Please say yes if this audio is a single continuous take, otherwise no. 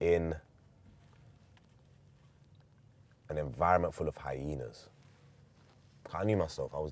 yes